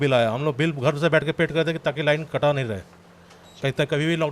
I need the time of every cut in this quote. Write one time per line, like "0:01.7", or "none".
none